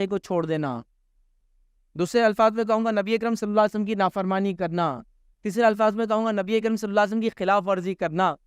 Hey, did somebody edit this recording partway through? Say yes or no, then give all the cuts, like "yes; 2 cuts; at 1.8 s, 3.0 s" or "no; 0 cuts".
no; 0 cuts